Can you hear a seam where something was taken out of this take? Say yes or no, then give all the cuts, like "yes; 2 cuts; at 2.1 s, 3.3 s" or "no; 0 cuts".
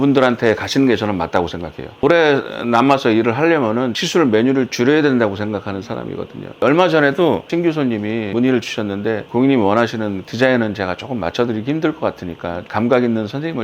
yes; 3 cuts; at 2.0 s, 4.0 s, 9.2 s